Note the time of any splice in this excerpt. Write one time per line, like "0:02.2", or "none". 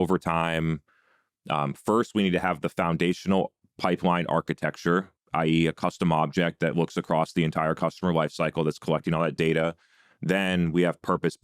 0:05.2